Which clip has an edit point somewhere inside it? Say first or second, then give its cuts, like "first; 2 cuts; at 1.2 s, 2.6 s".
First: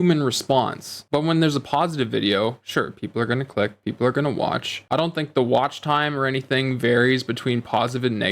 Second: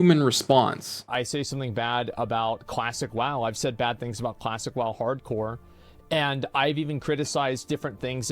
second; 1 cut; at 1.1 s